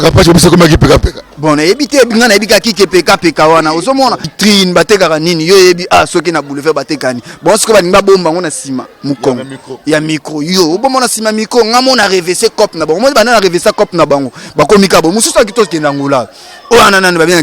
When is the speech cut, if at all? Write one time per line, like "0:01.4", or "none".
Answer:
0:04.3

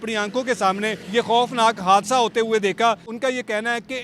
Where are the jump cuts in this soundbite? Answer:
0:01.0
0:03.1

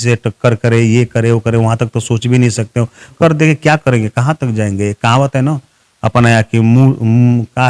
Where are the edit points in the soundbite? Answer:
0:03.1

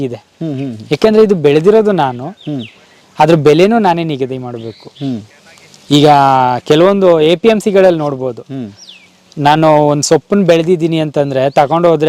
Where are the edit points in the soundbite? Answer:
none

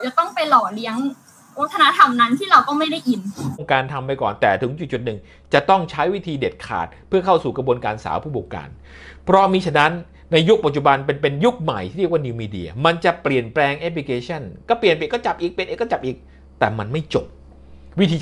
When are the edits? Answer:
0:03.6

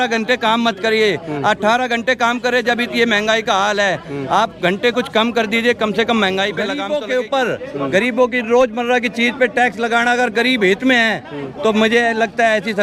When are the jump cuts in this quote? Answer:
0:06.8

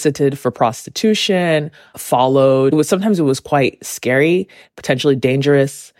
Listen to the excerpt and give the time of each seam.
0:02.7

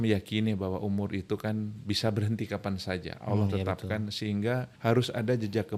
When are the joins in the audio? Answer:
0:04.7

